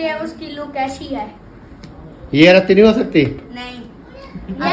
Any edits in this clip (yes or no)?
no